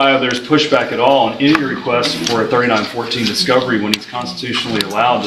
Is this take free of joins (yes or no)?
yes